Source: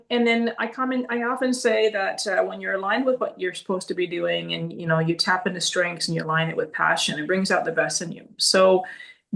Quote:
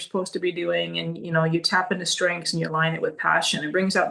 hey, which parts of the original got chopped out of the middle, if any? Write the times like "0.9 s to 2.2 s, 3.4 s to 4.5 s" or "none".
none